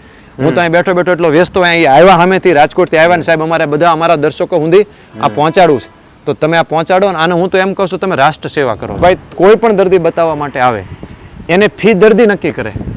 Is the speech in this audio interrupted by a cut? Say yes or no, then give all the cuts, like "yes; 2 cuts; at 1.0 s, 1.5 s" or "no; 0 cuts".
yes; 1 cut; at 9.0 s